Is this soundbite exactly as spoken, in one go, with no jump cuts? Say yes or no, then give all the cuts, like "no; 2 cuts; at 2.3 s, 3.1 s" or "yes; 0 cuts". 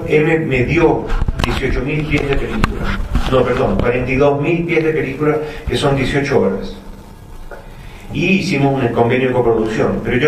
no; 1 cut; at 8.4 s